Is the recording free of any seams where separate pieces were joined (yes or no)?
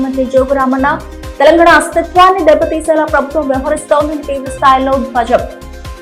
yes